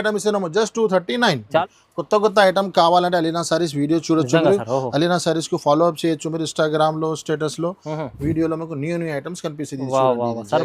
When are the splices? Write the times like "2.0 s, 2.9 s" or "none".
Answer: 1.6 s